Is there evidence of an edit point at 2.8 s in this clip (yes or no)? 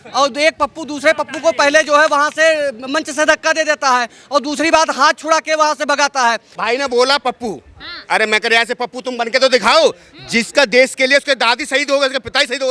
no